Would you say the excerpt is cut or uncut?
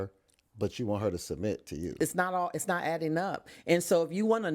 cut